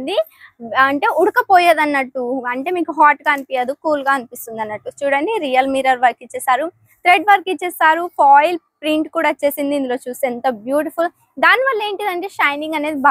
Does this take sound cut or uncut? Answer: uncut